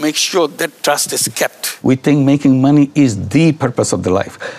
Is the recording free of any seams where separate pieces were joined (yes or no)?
no